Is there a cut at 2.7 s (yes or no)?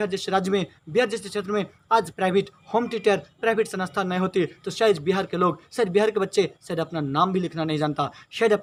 no